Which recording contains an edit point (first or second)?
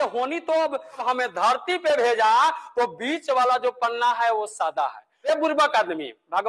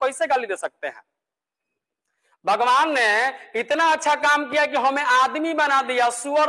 first